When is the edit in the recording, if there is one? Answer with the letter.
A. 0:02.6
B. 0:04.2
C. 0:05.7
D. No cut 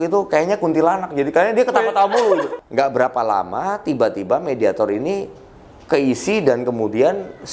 A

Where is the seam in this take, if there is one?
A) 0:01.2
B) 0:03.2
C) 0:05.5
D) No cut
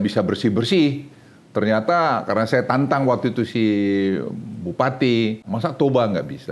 C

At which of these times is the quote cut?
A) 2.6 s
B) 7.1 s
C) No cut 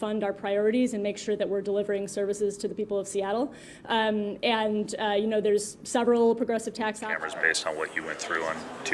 B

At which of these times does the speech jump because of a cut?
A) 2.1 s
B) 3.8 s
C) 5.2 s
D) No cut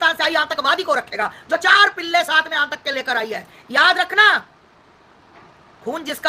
D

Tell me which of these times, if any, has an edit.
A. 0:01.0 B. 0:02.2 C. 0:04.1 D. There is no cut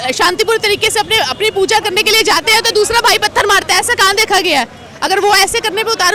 D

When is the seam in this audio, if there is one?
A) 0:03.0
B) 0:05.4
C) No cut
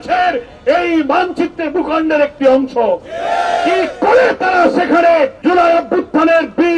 B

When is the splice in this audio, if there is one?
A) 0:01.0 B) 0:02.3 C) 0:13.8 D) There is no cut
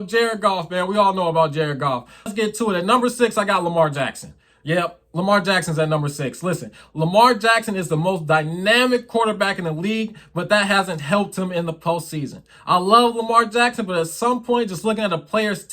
B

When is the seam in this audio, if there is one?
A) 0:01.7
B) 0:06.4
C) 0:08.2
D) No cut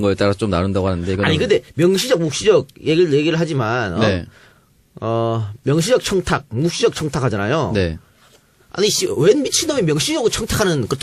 A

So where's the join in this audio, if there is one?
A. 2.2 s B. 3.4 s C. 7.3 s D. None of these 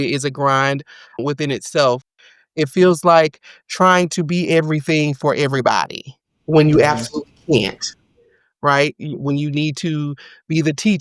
A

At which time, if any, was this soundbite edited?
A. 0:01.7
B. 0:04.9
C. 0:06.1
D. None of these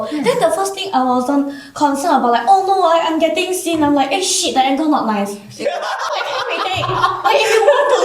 C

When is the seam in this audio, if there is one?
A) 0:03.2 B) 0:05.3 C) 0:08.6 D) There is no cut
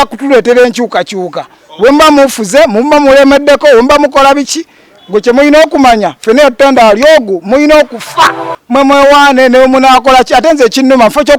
C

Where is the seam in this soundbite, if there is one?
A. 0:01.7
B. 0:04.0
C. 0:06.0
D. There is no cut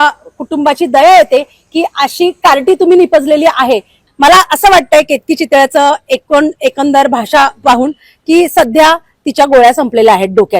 B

